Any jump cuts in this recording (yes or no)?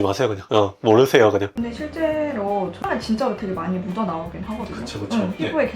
yes